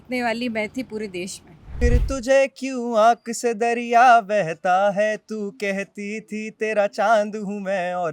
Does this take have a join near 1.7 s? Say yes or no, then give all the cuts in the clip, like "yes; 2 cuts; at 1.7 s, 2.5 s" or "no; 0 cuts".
yes; 1 cut; at 1.7 s